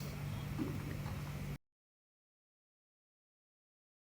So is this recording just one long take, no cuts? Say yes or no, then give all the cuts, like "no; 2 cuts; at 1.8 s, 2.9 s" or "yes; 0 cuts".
yes; 0 cuts